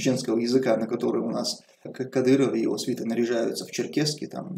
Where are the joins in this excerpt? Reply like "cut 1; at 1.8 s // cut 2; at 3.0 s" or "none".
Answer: cut 1; at 1.9 s